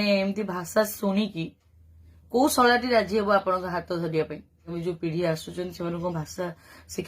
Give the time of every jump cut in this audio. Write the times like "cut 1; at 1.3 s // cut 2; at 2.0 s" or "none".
cut 1; at 4.7 s